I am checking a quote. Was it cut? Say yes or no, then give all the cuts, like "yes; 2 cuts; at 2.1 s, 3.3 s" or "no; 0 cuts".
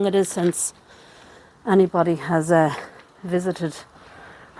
no; 0 cuts